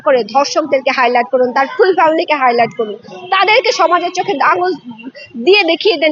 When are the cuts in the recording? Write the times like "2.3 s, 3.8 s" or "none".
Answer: none